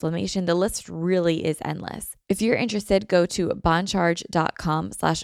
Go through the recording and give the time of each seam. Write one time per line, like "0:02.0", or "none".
0:02.1